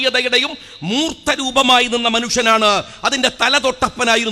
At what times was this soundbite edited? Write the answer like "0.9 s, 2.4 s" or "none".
none